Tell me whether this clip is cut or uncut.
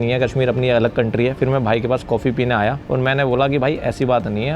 cut